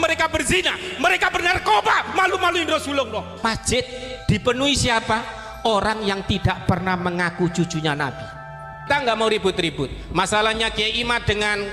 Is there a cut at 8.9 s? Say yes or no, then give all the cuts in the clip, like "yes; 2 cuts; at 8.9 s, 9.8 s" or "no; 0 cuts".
yes; 2 cuts; at 3.3 s, 8.9 s